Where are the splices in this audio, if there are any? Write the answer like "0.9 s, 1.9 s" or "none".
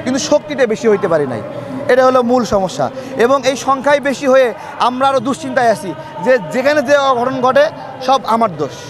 none